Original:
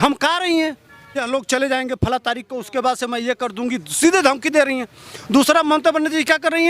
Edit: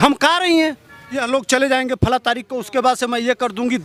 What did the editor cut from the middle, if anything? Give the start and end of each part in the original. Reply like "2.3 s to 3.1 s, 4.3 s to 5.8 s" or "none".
none